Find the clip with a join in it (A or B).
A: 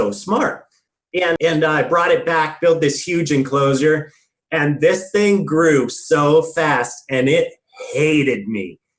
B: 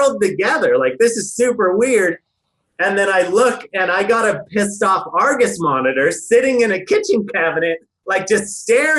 A